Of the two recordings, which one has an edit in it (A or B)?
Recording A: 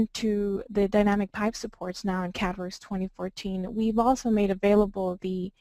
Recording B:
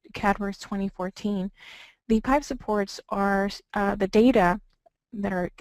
B